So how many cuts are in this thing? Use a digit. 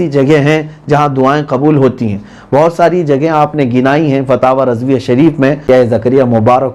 1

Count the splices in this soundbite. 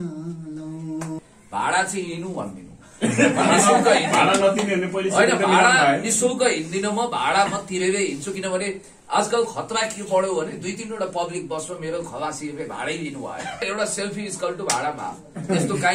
2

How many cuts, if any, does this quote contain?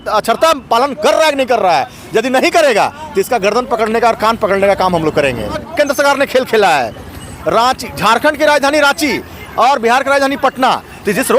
1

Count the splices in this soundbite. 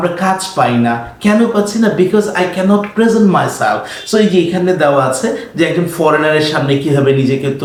0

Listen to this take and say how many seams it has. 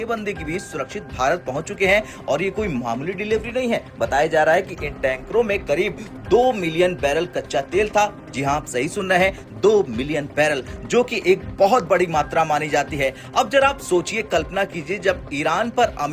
0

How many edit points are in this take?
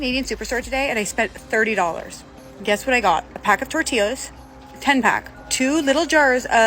2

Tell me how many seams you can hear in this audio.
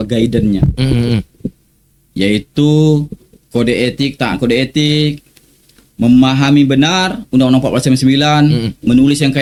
0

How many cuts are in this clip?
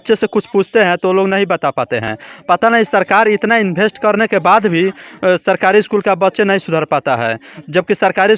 0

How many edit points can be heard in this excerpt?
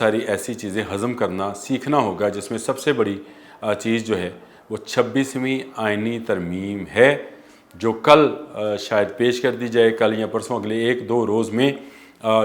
0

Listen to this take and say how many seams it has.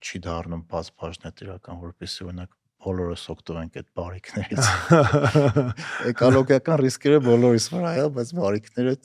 0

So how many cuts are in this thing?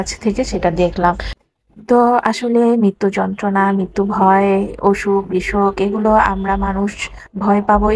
0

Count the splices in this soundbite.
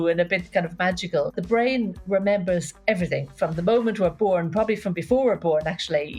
1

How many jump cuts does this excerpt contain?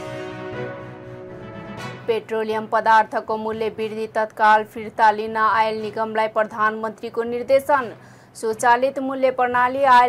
1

